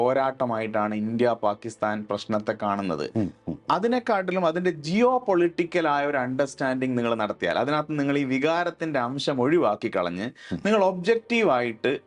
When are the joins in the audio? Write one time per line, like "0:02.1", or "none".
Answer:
none